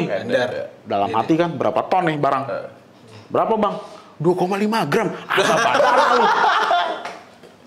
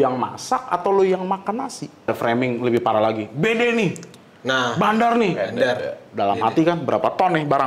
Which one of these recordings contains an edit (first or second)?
second